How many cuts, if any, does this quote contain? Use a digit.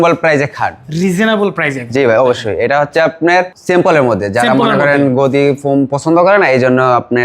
1